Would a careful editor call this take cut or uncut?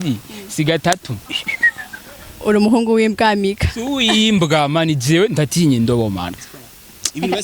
cut